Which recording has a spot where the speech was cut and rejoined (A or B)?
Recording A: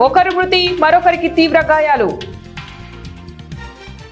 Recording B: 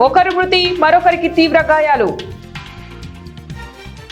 B